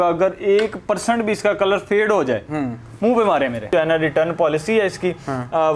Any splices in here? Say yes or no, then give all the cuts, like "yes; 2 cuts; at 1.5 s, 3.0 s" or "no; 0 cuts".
yes; 1 cut; at 3.7 s